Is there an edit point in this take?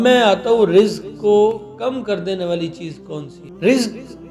no; 0 cuts

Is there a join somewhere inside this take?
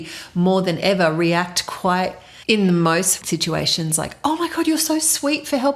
yes; 1 cut; at 2.3 s

